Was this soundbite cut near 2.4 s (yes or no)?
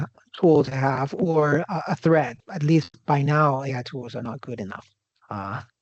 yes